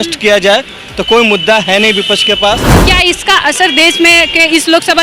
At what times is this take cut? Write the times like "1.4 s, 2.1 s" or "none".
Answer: 2.8 s